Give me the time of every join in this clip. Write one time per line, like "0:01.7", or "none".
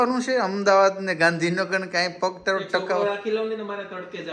none